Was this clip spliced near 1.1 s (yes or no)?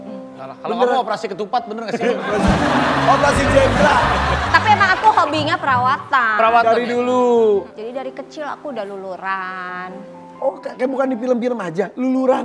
no